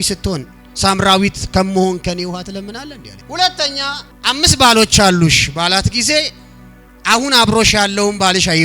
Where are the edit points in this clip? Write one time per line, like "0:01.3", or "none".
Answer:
0:04.1